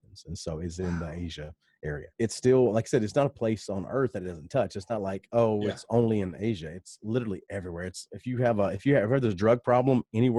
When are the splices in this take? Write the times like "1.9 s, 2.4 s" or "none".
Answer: 2.1 s